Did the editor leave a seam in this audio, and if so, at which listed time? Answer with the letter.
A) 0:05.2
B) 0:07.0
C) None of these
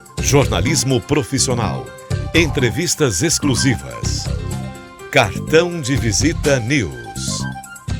B